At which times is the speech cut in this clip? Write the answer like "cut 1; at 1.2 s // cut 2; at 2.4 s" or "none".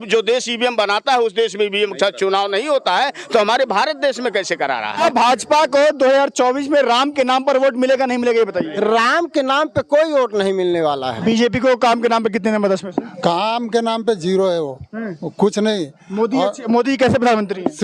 cut 1; at 4.9 s // cut 2; at 11.1 s